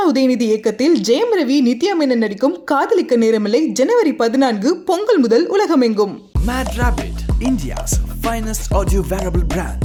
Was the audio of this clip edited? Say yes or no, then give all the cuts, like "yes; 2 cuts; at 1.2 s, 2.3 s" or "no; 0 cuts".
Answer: no; 0 cuts